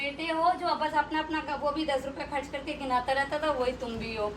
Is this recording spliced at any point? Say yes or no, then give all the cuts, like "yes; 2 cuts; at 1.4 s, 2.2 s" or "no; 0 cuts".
no; 0 cuts